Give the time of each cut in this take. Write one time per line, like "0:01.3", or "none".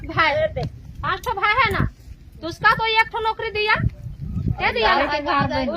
none